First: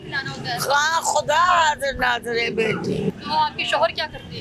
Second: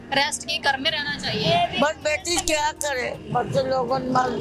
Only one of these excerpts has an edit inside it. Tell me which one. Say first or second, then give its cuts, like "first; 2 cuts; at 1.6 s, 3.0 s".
first; 1 cut; at 3.2 s